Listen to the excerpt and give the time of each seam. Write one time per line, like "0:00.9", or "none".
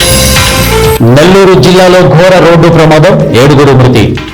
none